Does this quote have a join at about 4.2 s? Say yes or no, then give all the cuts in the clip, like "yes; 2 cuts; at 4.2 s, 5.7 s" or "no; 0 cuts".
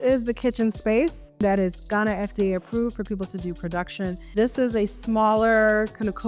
yes; 2 cuts; at 1.4 s, 4.2 s